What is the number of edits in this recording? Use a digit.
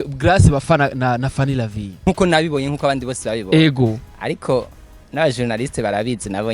1